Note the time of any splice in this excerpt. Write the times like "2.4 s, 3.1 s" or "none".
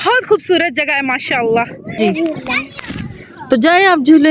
2.0 s